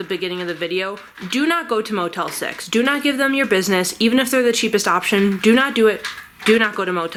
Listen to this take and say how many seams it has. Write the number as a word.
zero